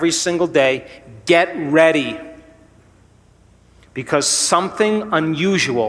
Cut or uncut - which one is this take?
uncut